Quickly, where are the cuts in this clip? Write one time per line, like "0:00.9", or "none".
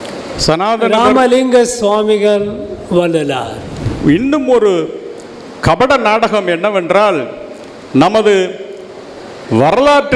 0:03.9